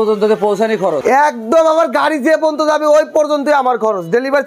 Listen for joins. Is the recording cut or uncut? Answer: cut